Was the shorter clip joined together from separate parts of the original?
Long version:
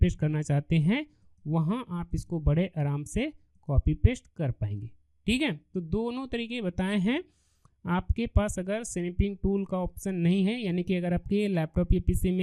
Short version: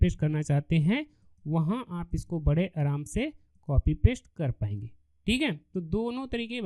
no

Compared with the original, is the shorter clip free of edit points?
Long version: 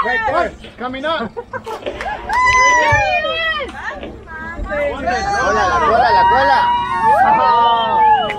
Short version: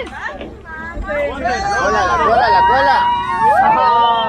yes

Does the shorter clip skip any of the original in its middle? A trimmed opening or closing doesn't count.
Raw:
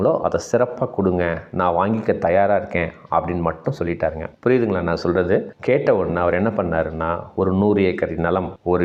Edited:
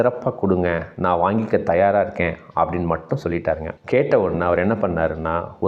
yes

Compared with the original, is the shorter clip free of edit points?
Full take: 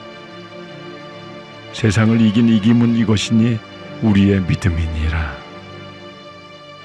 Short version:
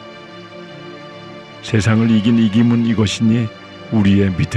no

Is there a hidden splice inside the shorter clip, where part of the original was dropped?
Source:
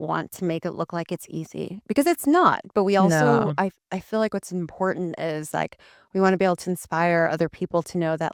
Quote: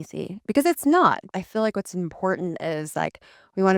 yes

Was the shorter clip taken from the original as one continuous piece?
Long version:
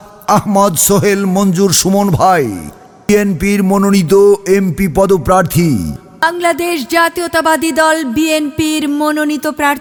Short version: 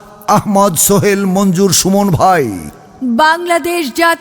no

